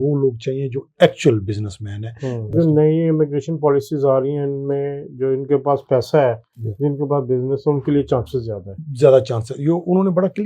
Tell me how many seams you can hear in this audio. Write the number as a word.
one